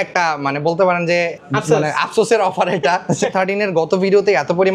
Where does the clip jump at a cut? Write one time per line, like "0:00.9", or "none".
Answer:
0:01.4
0:03.3